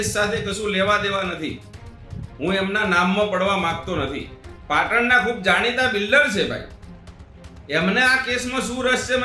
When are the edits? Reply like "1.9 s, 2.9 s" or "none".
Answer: 4.5 s